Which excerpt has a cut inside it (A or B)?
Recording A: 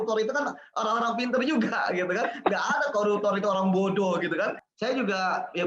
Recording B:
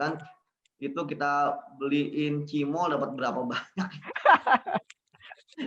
A